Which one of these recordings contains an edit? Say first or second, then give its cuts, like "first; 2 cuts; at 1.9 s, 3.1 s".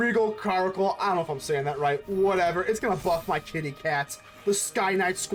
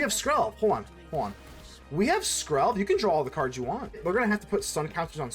second; 1 cut; at 4.0 s